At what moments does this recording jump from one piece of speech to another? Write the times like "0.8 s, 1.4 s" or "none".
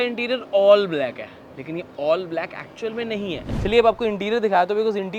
3.5 s